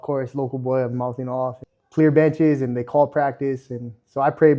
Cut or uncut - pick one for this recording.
cut